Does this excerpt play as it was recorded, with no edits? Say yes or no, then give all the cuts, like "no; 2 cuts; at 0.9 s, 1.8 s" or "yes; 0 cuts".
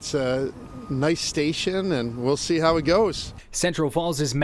no; 1 cut; at 3.3 s